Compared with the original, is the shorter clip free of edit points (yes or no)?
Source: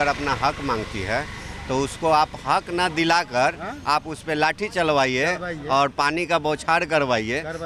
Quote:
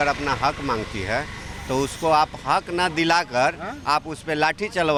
yes